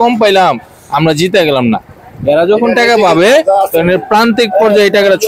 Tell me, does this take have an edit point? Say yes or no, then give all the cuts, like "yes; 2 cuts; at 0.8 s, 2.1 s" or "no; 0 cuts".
no; 0 cuts